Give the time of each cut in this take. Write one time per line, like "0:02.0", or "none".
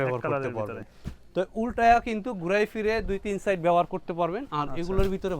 none